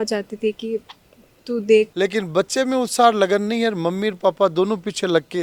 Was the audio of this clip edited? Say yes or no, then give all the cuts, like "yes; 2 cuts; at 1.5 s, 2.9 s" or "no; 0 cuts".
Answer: yes; 1 cut; at 1.9 s